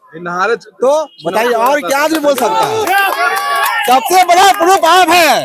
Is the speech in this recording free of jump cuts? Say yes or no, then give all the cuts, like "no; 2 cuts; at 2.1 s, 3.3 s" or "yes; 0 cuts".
yes; 0 cuts